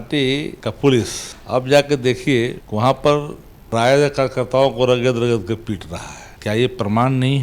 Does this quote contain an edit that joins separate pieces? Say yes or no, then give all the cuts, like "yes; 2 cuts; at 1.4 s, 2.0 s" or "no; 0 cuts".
no; 0 cuts